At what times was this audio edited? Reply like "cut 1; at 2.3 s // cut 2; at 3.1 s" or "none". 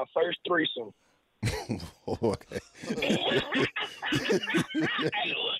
none